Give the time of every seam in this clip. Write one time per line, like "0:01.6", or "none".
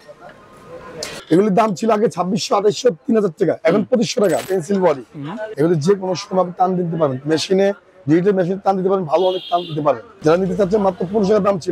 0:01.1
0:04.4
0:05.5
0:10.1